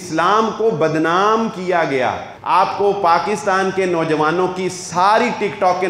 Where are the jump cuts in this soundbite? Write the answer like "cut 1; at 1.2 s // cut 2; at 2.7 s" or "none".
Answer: cut 1; at 2.3 s